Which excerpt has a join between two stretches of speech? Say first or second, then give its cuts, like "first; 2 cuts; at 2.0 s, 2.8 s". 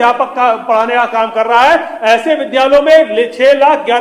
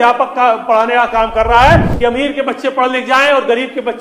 second; 1 cut; at 1.9 s